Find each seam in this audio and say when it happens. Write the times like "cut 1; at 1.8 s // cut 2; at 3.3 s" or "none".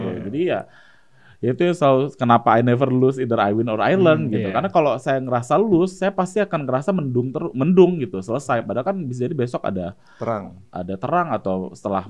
none

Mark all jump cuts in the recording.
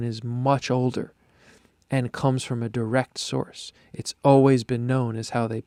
none

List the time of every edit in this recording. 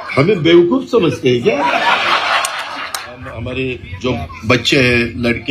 cut 1; at 3.3 s

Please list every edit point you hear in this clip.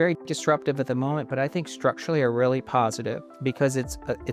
cut 1; at 3.3 s

